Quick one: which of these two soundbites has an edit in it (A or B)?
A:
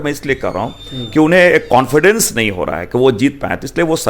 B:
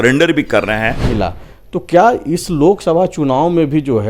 B